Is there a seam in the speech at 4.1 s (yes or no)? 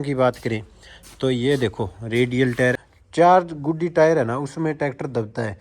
no